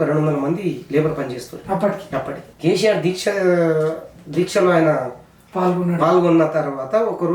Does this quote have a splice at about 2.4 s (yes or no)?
yes